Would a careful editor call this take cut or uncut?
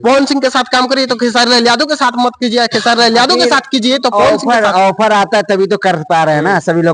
uncut